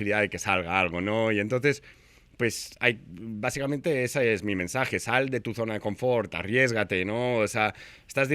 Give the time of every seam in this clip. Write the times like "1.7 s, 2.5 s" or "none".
none